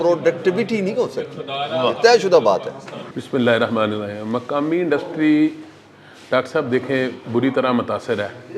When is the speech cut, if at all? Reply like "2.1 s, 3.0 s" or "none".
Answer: none